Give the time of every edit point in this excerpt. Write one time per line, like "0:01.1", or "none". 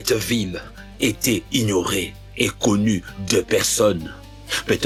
none